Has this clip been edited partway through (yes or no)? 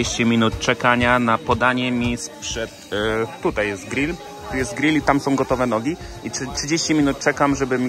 no